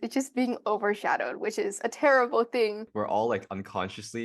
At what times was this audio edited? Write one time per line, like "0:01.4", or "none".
0:02.9